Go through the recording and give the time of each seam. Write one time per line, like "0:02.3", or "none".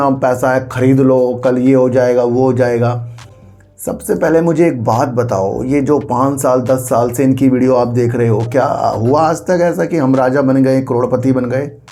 none